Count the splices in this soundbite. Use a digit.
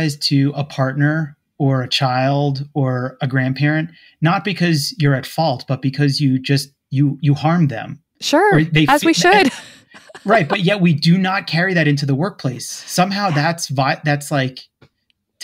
0